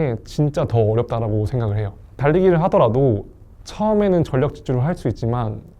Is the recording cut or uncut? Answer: cut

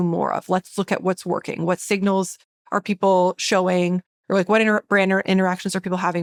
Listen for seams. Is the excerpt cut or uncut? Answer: uncut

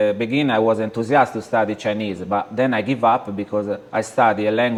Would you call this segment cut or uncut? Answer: uncut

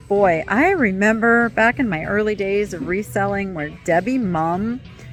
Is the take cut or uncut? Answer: uncut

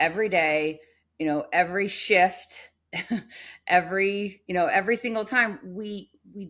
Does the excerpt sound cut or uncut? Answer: uncut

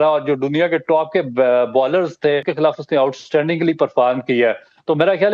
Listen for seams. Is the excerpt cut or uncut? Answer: cut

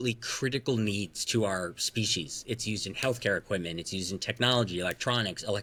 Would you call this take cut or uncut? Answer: uncut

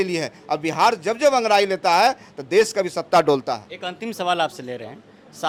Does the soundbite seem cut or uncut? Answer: uncut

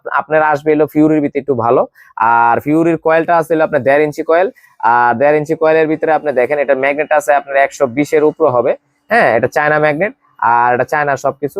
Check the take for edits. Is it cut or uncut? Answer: uncut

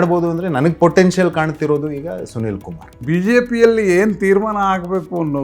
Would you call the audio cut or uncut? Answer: cut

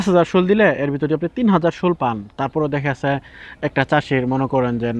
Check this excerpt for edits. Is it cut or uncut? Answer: uncut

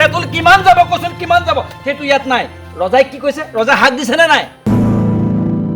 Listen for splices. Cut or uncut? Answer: cut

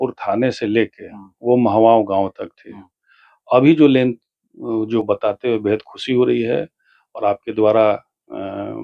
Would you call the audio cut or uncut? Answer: cut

